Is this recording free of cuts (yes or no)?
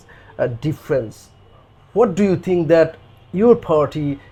yes